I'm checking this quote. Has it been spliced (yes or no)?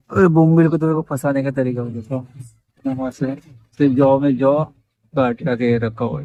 no